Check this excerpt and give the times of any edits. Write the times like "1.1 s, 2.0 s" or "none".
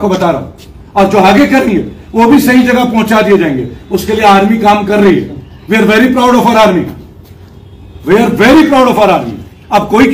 none